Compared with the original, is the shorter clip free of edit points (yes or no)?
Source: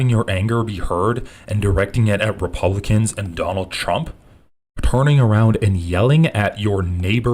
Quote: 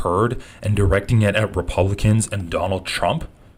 yes